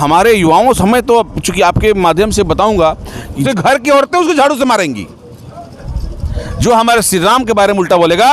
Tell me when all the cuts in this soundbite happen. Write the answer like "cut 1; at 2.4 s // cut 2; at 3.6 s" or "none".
cut 1; at 3.5 s

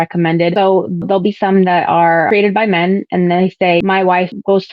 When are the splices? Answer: cut 1; at 1.0 s // cut 2; at 2.3 s // cut 3; at 3.8 s

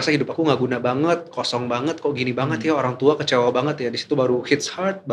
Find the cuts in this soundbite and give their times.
none

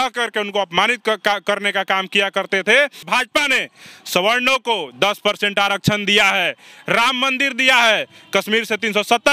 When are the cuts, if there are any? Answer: cut 1; at 3.0 s

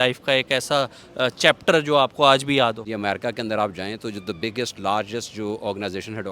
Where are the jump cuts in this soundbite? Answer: cut 1; at 2.8 s

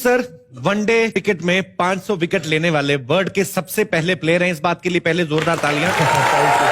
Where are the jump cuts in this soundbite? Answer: cut 1; at 1.1 s

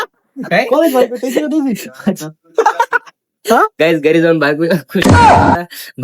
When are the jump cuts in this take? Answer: none

